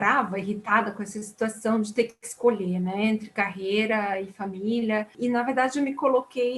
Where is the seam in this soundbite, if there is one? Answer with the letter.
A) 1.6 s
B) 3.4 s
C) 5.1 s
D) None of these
C